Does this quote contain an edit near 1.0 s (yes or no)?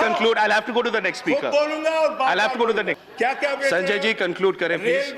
no